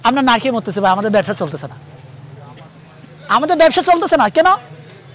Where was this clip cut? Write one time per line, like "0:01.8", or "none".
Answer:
none